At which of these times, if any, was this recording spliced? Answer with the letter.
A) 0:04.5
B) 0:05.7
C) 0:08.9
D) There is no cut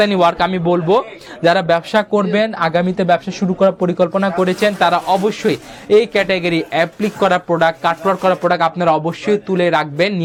D